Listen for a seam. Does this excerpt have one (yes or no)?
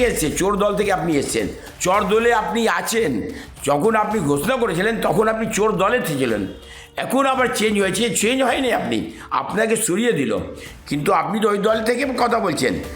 no